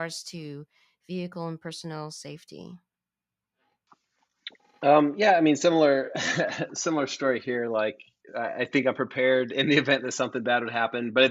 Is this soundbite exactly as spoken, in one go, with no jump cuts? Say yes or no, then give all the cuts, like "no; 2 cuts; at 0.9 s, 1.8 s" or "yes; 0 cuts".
yes; 0 cuts